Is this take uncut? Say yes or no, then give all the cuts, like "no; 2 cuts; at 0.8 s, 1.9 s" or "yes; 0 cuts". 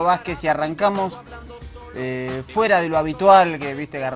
no; 1 cut; at 1.5 s